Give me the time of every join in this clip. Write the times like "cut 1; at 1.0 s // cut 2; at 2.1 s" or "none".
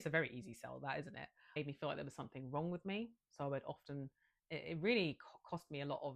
cut 1; at 1.6 s